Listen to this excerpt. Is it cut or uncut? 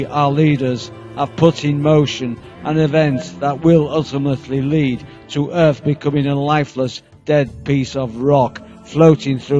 uncut